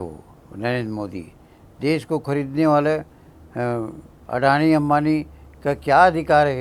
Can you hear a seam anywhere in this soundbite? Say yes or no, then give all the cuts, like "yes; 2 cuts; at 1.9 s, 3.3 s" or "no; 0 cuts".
no; 0 cuts